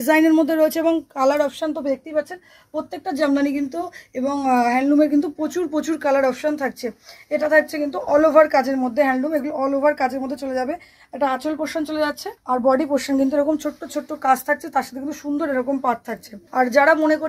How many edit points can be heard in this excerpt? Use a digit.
0